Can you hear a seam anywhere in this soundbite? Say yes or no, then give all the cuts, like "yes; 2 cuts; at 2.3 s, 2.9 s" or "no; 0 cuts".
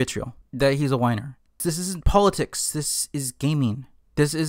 yes; 1 cut; at 1.6 s